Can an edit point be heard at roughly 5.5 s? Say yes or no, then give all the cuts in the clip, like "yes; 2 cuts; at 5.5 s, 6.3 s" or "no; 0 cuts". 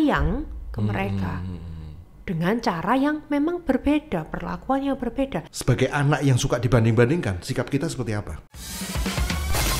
yes; 2 cuts; at 5.5 s, 8.6 s